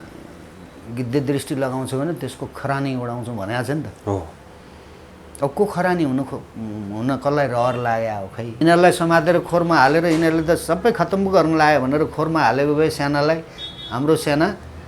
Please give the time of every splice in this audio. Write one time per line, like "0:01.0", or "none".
0:08.6